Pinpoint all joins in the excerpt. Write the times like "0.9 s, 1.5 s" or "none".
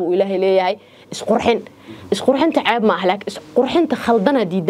none